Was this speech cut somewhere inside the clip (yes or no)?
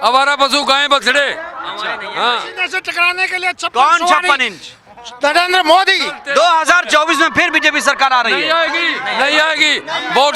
yes